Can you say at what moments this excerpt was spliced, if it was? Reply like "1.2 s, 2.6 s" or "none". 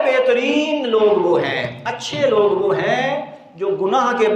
none

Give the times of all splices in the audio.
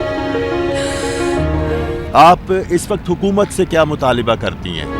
none

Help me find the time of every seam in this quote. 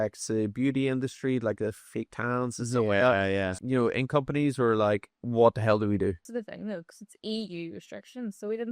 3.5 s, 5.2 s, 6.2 s

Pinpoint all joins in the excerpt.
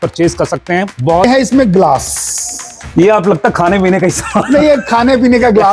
1.2 s

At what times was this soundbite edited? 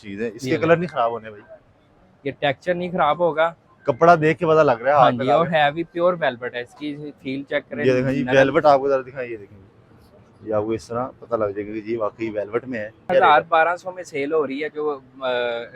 13.1 s

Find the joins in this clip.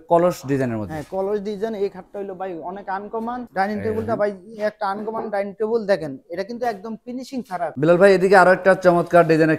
3.4 s, 7.7 s

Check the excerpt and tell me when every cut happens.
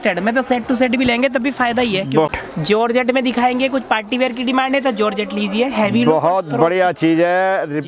2.3 s

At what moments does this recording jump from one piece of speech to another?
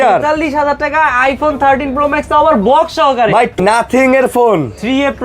3.6 s

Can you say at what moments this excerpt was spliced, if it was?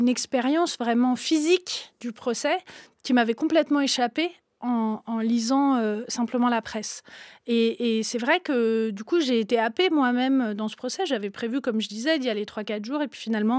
none

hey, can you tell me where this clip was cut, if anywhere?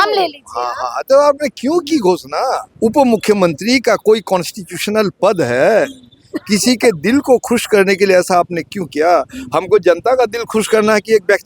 2.7 s

